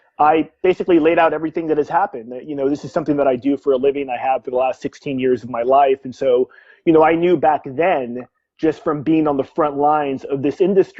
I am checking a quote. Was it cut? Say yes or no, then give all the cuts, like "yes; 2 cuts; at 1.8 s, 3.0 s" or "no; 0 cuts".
yes; 1 cut; at 1.8 s